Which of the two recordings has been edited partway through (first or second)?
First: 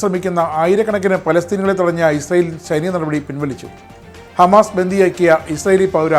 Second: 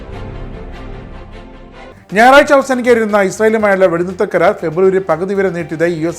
second